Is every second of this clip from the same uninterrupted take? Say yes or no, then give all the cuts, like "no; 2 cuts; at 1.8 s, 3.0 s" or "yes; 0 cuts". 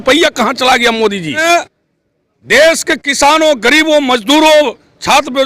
no; 1 cut; at 1.4 s